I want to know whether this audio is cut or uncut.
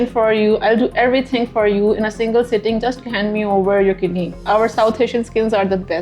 cut